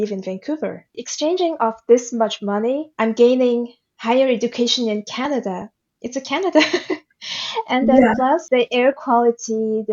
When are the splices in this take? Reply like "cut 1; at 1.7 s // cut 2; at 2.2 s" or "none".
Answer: cut 1; at 0.9 s // cut 2; at 2.9 s // cut 3; at 8.4 s